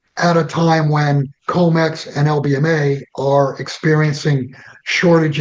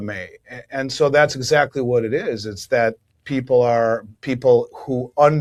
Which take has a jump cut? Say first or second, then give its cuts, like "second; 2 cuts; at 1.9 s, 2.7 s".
first; 1 cut; at 1.3 s